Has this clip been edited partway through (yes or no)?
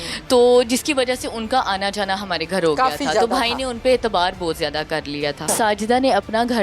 yes